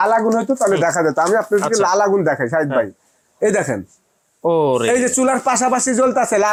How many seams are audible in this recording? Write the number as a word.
zero